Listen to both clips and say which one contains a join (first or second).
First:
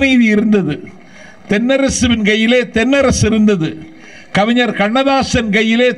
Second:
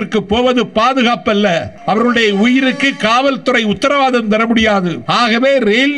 second